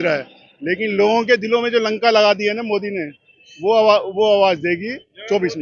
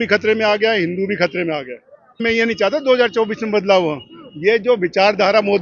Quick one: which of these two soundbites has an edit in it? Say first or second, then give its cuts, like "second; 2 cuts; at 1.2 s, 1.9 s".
second; 1 cut; at 2.2 s